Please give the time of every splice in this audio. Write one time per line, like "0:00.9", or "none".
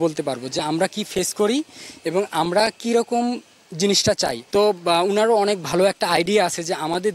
0:04.4